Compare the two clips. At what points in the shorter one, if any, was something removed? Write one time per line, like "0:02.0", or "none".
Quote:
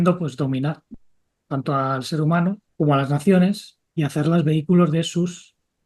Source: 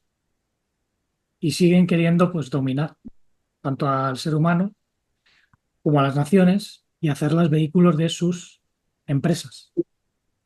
0:02.6